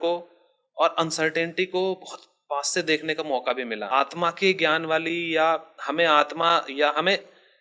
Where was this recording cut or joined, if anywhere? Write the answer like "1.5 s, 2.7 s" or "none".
3.9 s